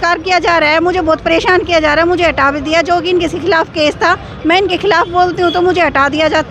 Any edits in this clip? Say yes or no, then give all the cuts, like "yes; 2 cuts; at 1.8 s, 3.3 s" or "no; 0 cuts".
no; 0 cuts